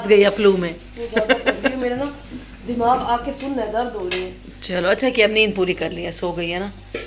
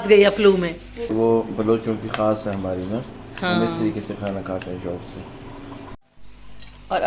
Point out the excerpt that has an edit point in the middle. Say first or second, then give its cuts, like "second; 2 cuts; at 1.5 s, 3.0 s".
second; 2 cuts; at 1.1 s, 6.0 s